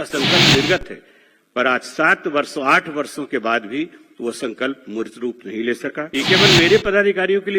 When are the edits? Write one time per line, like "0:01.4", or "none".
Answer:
0:06.0

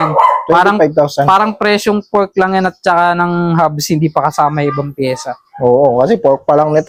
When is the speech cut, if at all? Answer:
none

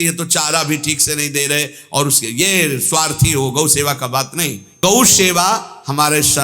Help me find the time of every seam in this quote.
0:04.6

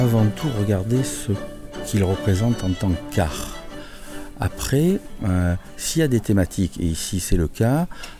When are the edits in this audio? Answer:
none

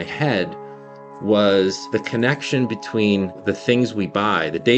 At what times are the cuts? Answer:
0:01.8
0:03.4

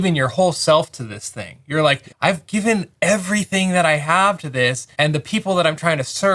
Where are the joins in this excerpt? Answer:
0:02.1
0:04.8

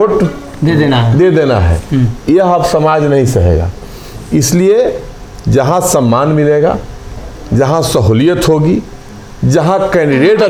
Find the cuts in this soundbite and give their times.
none

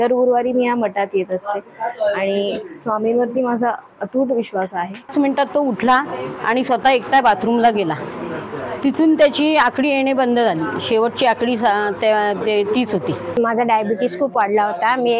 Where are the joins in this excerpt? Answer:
0:05.1
0:13.2

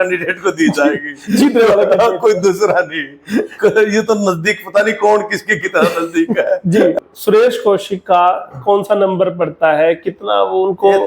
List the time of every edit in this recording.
0:07.0

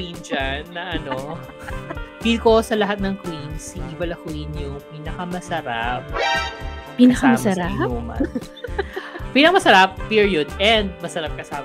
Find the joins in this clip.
0:01.6

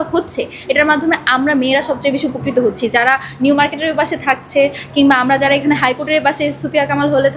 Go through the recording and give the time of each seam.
none

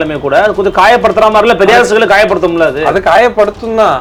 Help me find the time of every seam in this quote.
none

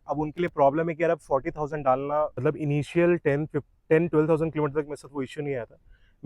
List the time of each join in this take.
0:02.4

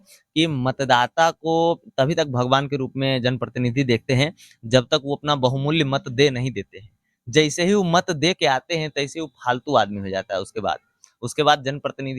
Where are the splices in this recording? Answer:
none

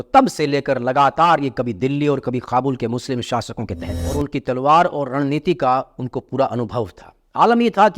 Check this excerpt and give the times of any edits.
0:04.0

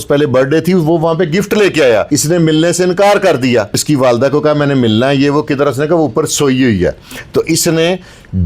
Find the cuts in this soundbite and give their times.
0:02.1
0:03.8

